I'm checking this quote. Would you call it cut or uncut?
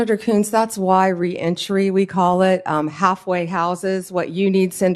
uncut